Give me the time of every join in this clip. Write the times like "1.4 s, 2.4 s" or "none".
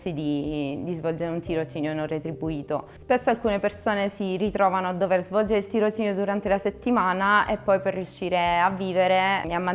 none